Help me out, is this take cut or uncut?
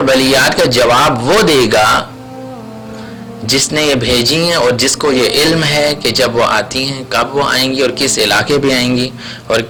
uncut